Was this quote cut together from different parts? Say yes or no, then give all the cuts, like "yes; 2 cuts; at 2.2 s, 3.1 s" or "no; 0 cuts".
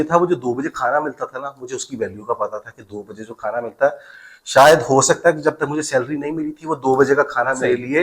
no; 0 cuts